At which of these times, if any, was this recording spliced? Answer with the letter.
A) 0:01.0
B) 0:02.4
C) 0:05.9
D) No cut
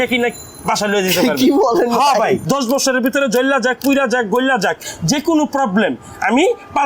B